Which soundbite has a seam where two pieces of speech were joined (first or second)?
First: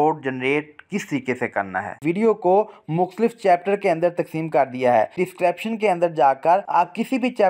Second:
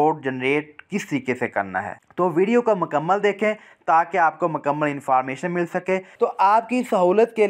first